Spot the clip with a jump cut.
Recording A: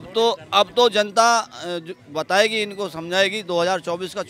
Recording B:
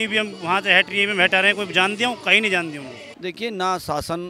B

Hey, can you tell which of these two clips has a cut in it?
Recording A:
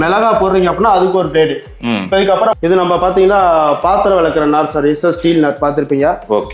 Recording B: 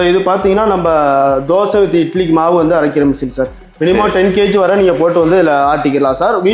A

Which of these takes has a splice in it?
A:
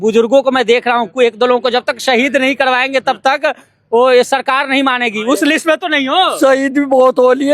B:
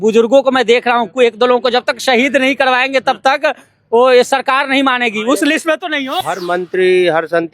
B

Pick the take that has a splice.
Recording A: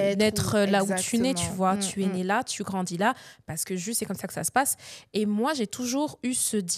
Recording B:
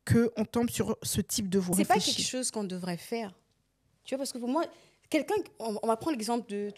B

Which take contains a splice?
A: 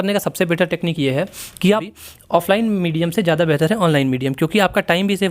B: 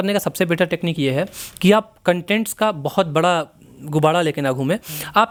A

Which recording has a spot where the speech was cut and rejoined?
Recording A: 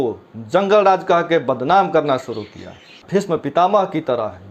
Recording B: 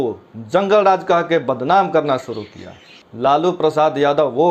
A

